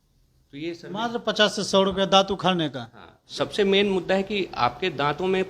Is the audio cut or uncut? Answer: cut